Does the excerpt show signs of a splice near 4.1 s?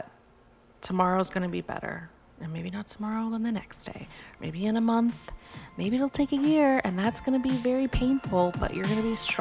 no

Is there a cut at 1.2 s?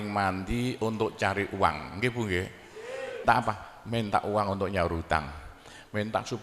no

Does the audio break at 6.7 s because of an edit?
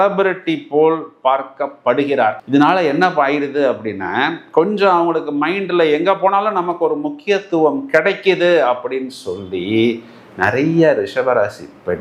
no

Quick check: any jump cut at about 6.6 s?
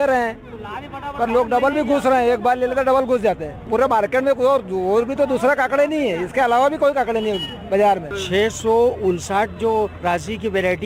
no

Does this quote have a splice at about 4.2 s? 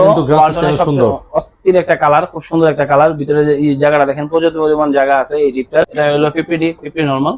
no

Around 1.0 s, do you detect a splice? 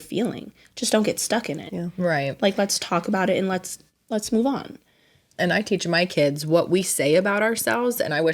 no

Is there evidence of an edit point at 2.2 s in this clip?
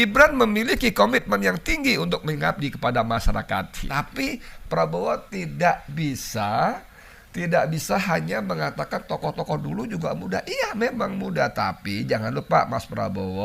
no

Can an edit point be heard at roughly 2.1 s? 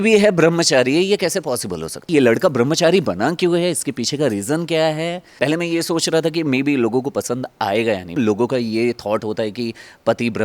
yes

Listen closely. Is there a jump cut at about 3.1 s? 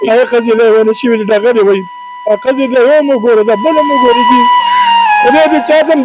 no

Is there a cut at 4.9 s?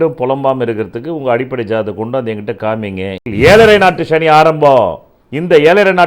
no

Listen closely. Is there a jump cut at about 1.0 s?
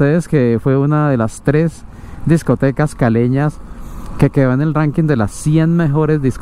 no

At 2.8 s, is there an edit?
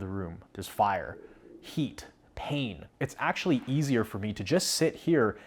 yes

